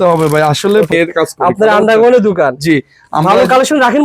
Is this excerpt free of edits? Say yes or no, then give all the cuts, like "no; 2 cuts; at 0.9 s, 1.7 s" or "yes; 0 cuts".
no; 1 cut; at 0.9 s